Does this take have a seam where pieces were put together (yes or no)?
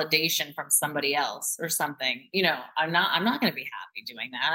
no